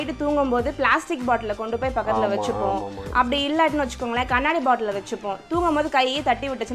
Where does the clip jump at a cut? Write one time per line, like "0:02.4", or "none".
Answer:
none